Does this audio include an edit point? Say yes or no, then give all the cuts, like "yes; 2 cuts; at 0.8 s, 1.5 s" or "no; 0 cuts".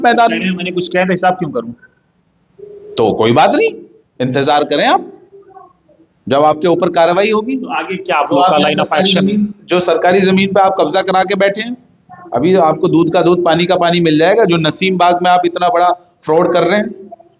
no; 0 cuts